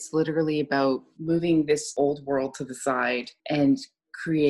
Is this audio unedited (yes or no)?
no